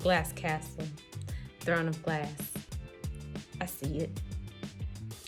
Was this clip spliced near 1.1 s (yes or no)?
no